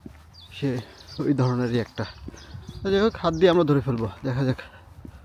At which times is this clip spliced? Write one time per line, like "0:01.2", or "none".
none